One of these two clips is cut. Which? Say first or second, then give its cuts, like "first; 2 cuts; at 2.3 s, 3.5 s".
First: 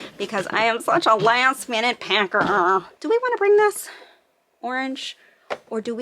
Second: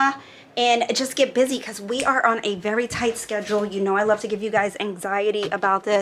first; 1 cut; at 2.9 s